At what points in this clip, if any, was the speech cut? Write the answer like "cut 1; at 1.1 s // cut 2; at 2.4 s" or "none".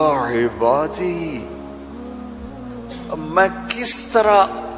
cut 1; at 1.4 s // cut 2; at 3.1 s